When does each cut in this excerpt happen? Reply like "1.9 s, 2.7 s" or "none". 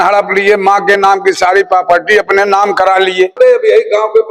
3.4 s

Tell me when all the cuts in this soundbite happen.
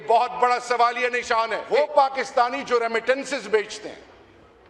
1.6 s

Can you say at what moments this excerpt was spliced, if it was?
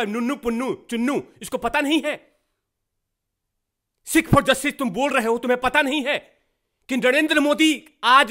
none

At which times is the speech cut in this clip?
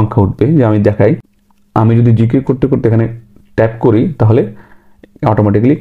none

